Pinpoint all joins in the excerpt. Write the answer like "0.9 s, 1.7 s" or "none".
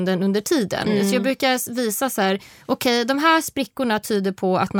none